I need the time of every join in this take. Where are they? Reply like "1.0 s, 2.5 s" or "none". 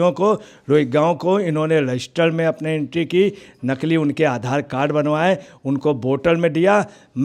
none